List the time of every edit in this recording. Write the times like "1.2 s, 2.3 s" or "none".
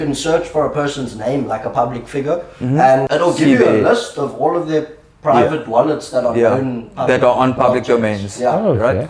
3.0 s, 7.6 s